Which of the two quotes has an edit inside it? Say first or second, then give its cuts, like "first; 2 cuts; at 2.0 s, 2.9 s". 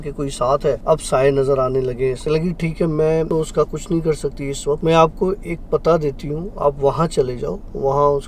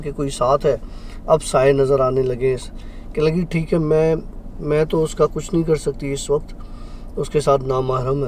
first; 4 cuts; at 0.8 s, 2.2 s, 3.3 s, 4.8 s